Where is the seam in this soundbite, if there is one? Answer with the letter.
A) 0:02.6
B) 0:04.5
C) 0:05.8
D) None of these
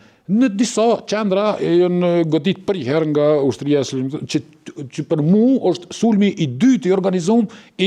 D